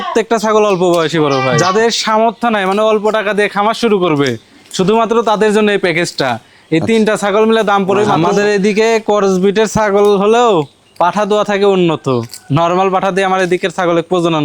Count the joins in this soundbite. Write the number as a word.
two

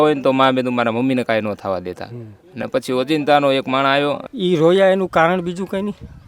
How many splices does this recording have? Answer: one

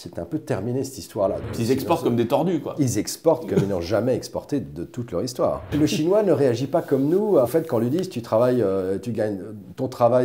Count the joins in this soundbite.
three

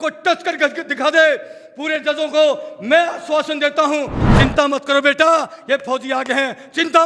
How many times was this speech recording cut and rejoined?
one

